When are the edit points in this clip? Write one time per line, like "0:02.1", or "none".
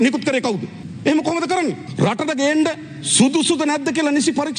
none